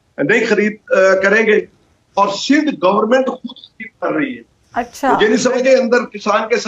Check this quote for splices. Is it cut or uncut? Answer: cut